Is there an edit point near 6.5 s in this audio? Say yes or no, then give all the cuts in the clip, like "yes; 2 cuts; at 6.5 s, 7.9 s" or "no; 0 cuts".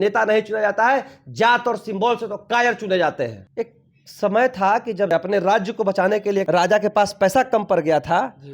yes; 3 cuts; at 3.4 s, 5.1 s, 6.5 s